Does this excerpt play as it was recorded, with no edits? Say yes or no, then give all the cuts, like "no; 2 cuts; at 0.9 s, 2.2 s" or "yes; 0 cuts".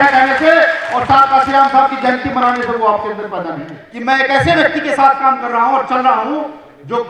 no; 1 cut; at 3.8 s